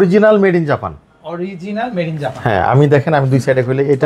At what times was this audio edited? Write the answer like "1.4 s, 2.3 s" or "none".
none